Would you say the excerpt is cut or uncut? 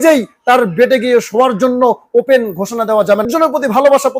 cut